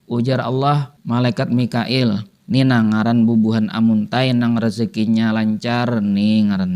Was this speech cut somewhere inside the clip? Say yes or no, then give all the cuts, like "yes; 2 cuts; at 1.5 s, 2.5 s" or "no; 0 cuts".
yes; 2 cuts; at 0.9 s, 2.3 s